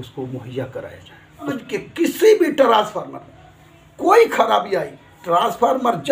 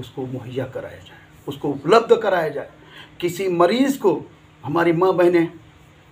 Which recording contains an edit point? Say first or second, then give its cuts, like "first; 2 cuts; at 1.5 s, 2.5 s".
first; 1 cut; at 1.5 s